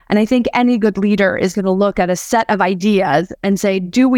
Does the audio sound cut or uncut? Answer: cut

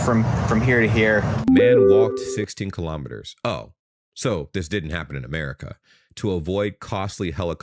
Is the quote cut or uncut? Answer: cut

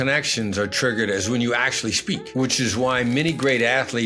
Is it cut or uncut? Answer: cut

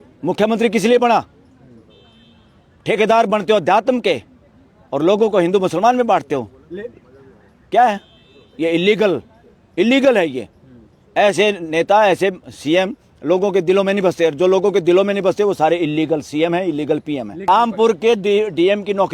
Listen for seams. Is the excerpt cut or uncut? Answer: cut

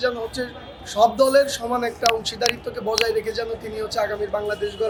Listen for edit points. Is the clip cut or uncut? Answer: uncut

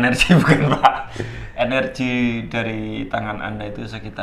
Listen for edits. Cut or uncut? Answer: uncut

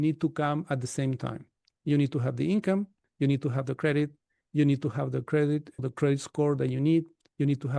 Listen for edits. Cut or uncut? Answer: uncut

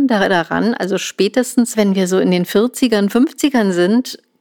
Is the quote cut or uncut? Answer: cut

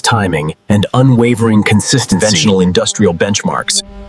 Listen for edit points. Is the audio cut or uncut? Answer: cut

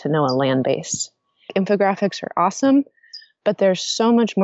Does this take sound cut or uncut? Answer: cut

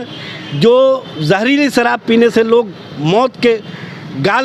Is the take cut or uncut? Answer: uncut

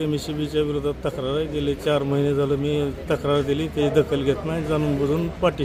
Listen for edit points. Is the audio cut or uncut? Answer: uncut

